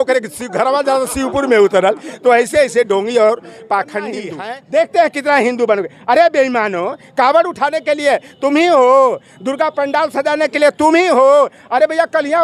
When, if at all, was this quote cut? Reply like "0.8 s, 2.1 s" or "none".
4.3 s